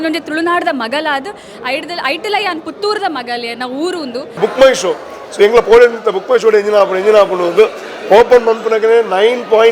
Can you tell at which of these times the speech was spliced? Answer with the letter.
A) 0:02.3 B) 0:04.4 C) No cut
B